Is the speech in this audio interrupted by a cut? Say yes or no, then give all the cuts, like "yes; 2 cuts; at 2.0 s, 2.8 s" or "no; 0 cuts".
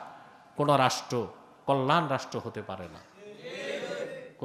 no; 0 cuts